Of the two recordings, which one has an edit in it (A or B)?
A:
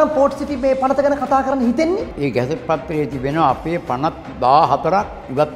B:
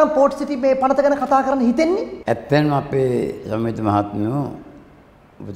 A